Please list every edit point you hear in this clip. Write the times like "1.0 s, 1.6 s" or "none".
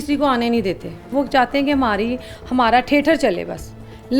1.0 s